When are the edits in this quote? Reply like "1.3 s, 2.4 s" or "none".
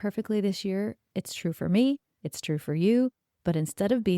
none